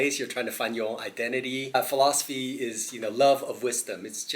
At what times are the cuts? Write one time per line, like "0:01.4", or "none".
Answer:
0:01.7